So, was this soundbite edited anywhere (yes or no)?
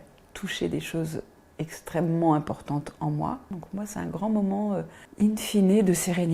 yes